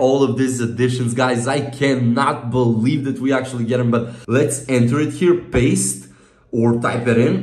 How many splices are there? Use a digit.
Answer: 1